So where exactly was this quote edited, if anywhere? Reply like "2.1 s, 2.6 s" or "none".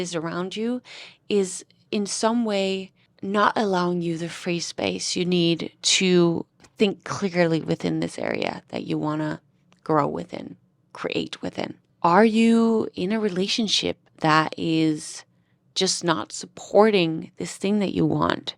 none